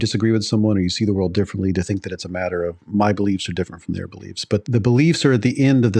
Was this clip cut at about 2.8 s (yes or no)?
no